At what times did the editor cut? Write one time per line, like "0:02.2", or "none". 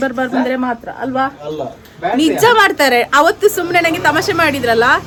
none